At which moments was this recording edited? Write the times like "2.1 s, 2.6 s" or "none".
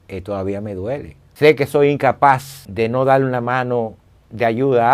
1.3 s, 2.6 s